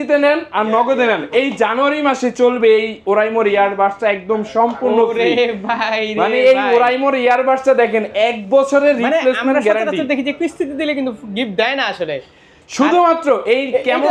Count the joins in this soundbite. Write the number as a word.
zero